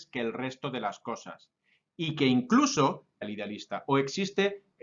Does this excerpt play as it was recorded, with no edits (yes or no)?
yes